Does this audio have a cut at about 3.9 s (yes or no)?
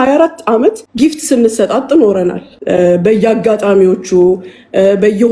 no